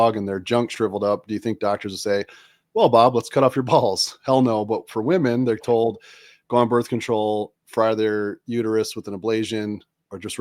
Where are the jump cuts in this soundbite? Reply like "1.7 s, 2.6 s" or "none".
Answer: none